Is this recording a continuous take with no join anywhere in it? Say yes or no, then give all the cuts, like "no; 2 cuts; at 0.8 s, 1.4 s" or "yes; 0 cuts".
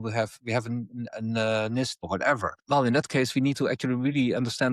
no; 1 cut; at 2.1 s